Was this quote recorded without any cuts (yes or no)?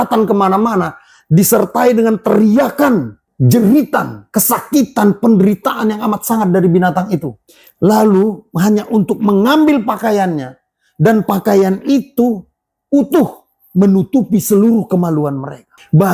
yes